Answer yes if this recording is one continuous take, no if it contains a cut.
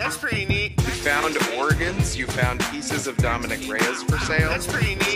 yes